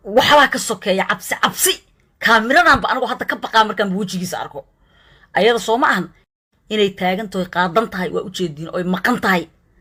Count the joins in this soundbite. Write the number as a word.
zero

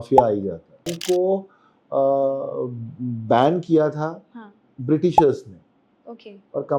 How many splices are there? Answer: one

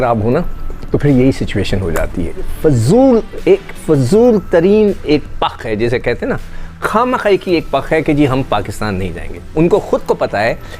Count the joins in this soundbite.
one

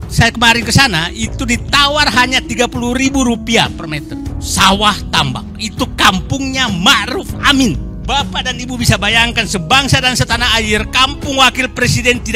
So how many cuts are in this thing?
two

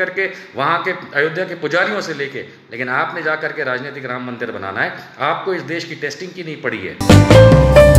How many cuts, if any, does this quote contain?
one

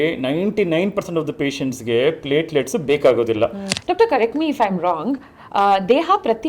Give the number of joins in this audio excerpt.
one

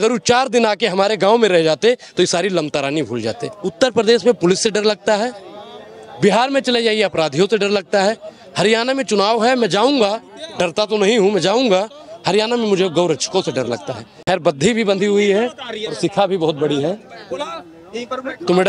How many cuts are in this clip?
two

